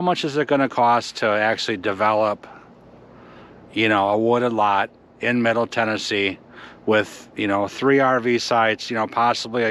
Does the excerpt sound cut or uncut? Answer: uncut